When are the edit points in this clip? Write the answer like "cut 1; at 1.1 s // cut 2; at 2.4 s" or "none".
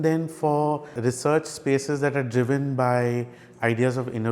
cut 1; at 0.9 s